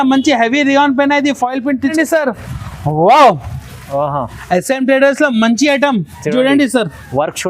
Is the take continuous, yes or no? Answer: no